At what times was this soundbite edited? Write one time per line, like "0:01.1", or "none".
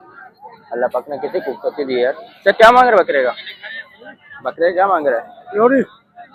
none